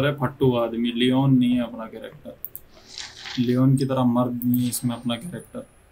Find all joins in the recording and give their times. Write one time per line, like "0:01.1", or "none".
none